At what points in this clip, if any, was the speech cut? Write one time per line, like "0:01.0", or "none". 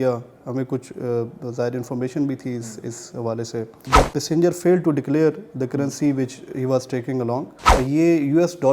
0:03.8
0:07.7